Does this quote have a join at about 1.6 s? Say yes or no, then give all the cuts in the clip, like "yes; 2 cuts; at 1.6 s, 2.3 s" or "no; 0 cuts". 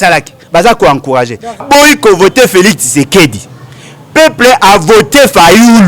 yes; 1 cut; at 1.6 s